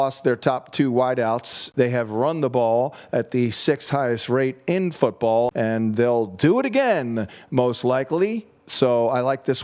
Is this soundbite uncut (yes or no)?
no